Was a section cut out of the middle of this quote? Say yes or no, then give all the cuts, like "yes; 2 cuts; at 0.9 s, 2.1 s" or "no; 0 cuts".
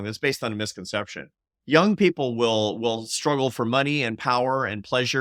no; 0 cuts